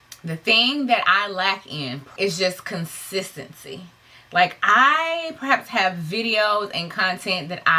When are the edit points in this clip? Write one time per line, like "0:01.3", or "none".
0:02.1